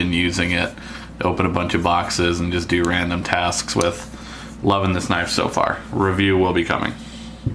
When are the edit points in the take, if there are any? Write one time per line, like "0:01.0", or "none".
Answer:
0:04.2

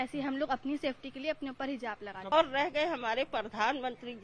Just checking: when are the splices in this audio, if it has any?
0:02.3

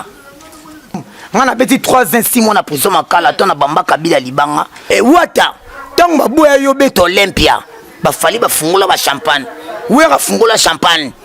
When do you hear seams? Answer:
0:01.1
0:04.9

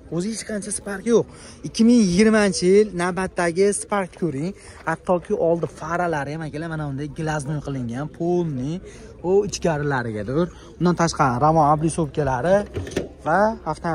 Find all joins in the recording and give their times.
none

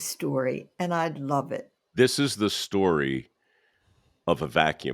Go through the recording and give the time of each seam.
0:01.7

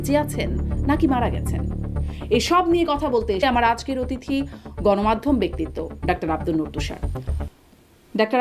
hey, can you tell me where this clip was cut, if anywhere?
none

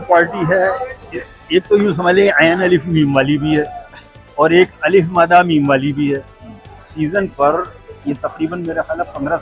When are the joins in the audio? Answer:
none

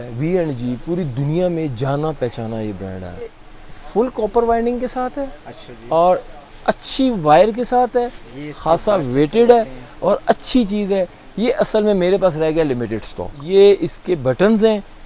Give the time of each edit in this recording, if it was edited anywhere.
0:03.5
0:13.3

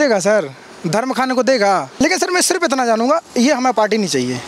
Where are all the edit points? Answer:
0:02.0

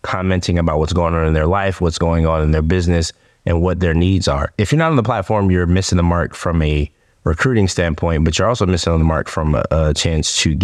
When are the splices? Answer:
none

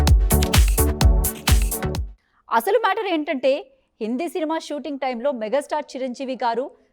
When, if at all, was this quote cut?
0:01.7

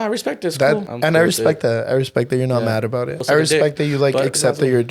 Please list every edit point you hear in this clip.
0:00.9
0:03.2

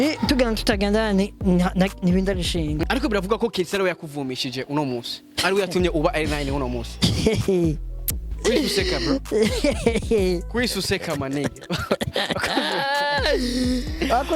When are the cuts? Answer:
0:02.8

